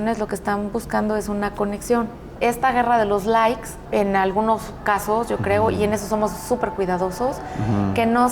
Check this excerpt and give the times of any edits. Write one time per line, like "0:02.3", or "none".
0:02.3
0:03.7